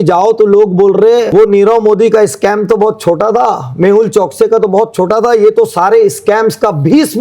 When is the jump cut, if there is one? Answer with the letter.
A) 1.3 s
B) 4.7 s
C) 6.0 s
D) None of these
A